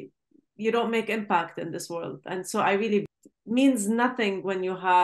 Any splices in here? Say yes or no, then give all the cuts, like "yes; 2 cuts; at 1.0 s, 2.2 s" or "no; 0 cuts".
yes; 1 cut; at 3.0 s